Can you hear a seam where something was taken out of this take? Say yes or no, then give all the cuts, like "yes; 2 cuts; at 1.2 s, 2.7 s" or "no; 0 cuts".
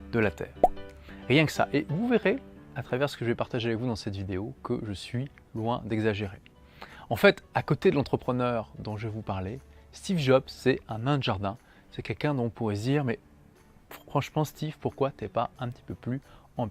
no; 0 cuts